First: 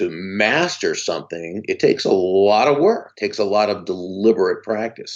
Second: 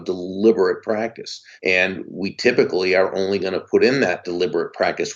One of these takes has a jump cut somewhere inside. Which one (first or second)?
second